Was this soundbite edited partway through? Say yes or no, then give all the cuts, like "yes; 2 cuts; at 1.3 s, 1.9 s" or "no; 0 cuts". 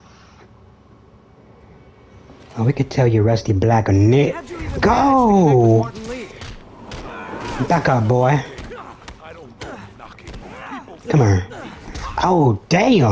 no; 0 cuts